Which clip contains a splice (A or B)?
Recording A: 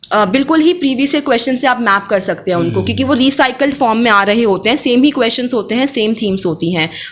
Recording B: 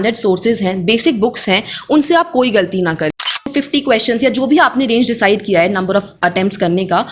B